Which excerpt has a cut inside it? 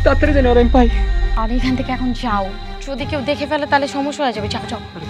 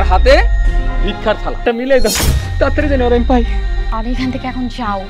second; 1 cut; at 1.6 s

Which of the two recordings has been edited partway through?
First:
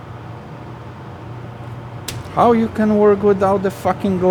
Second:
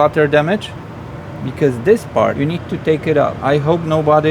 second; 2 cuts; at 2.3 s, 3.4 s

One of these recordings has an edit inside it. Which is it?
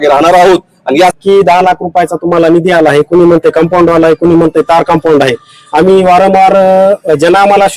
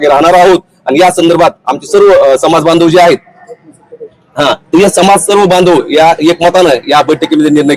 first; 1 cut; at 1.2 s

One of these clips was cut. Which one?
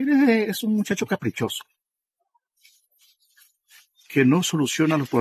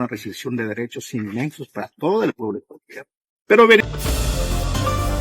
second; 1 cut; at 3.9 s

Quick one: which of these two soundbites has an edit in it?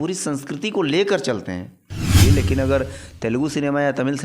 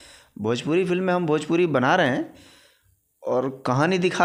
first; 1 cut; at 2.2 s

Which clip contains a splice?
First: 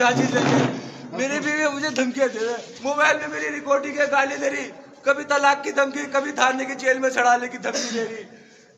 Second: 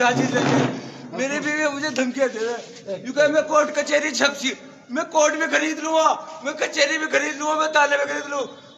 first; 1 cut; at 2.7 s

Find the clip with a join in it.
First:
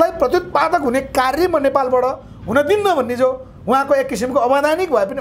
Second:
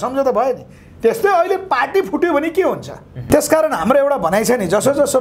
second; 1 cut; at 3.3 s

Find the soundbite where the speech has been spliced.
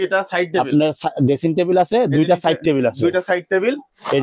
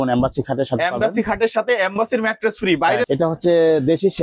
second; 1 cut; at 3.1 s

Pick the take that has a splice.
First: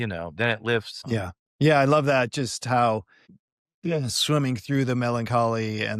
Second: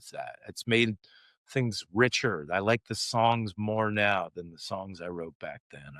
first; 2 cuts; at 0.9 s, 3.3 s

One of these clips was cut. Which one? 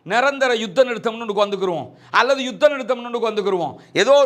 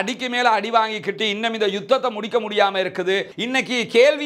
second; 1 cut; at 3.3 s

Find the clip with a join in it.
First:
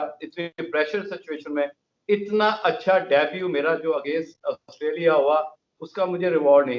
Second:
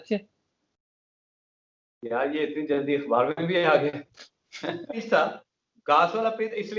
second; 1 cut; at 5.0 s

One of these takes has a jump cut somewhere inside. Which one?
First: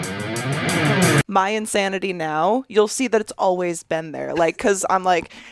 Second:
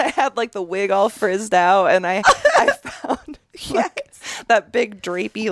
first; 1 cut; at 1.3 s

